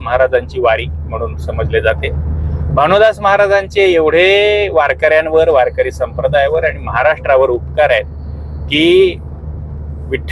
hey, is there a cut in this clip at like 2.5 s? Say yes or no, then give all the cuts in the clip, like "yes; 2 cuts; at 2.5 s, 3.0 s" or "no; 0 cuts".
no; 0 cuts